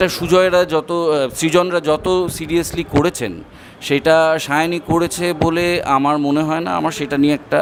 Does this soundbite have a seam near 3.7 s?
no; 0 cuts

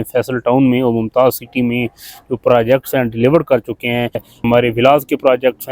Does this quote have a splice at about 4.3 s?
yes; 1 cut; at 4.3 s

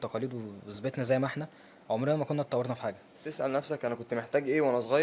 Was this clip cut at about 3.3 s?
yes; 1 cut; at 3.3 s

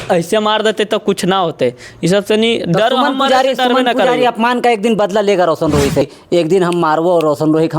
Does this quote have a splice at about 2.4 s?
no; 1 cut; at 6.1 s

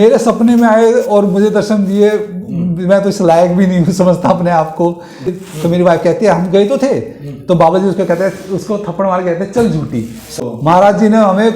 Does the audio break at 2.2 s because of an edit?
no; 2 cuts; at 5.4 s, 10.4 s

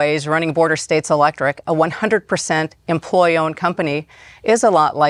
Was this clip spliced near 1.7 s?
no; 0 cuts

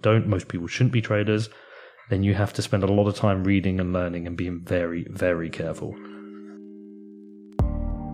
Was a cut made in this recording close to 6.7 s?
yes; 1 cut; at 6.7 s

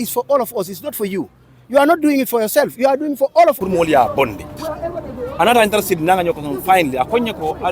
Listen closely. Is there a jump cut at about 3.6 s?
yes; 1 cut; at 3.6 s

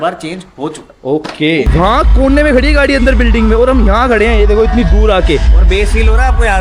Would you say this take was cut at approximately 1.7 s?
yes; 1 cut; at 1.7 s

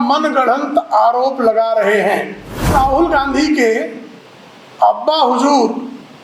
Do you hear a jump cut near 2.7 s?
yes; 1 cut; at 2.7 s

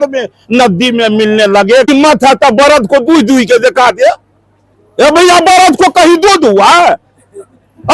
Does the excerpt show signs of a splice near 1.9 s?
yes; 1 cut; at 1.9 s

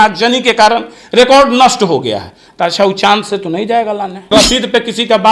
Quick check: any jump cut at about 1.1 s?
no; 1 cut; at 4.3 s

